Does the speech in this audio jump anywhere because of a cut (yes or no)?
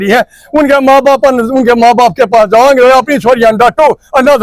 no